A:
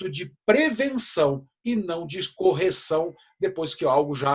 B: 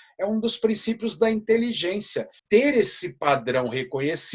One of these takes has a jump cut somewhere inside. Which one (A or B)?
B